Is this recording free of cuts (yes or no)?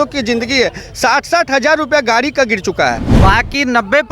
no